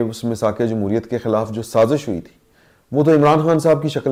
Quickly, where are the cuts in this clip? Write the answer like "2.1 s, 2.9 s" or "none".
none